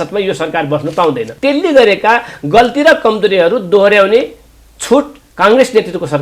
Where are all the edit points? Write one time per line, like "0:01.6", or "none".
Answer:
0:01.3
0:05.2